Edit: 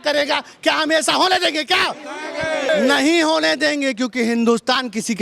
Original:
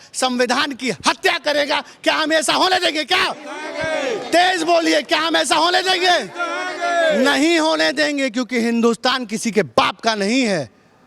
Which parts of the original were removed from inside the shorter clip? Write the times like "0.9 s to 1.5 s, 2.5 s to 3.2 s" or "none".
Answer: 4.1 s to 7.1 s

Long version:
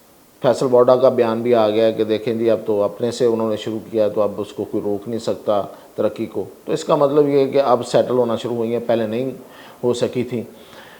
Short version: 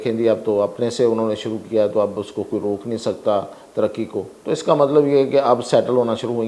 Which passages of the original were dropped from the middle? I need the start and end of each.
none

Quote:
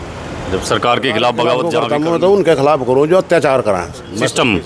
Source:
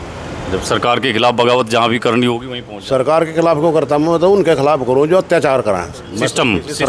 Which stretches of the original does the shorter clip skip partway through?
1.7 s to 3.7 s

